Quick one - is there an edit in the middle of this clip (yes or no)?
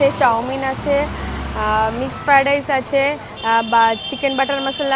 no